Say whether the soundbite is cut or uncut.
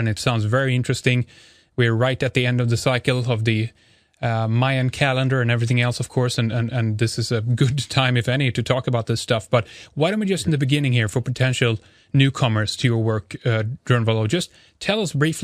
uncut